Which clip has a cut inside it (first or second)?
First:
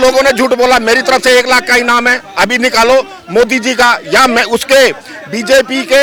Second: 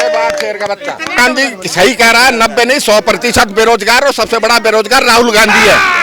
second